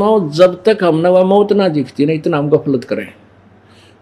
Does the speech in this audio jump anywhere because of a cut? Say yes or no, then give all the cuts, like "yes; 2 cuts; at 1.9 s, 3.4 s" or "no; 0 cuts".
no; 0 cuts